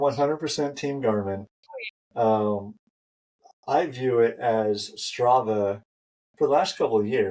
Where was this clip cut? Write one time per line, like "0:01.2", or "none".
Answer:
none